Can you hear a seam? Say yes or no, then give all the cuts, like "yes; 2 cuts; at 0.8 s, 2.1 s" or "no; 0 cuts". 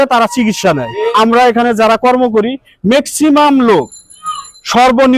yes; 1 cut; at 1.1 s